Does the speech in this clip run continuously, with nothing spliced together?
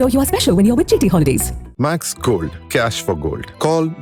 yes; 0 cuts

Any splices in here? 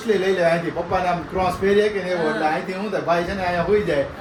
no; 0 cuts

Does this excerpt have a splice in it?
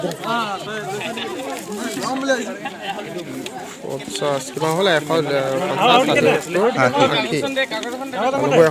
no; 0 cuts

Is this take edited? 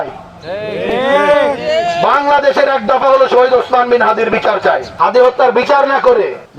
yes; 1 cut; at 4.9 s

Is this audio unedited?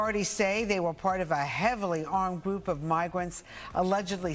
yes; 0 cuts

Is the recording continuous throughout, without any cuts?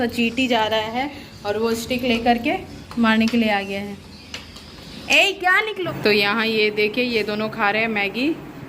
no; 1 cut; at 5.8 s

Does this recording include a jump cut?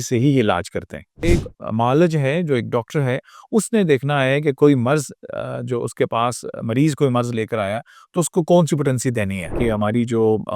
yes; 2 cuts; at 1.2 s, 9.5 s

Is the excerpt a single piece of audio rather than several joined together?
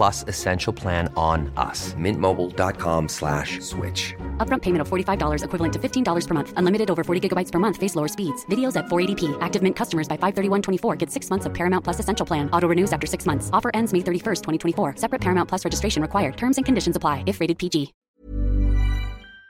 no; 1 cut; at 18.0 s

